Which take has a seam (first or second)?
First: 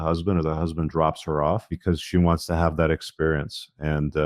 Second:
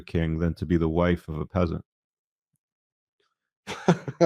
first